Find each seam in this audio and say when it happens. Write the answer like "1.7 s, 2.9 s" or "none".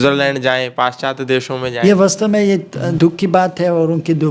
1.7 s, 2.8 s